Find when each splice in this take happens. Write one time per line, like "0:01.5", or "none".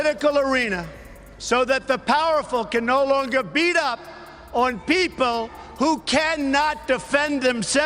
none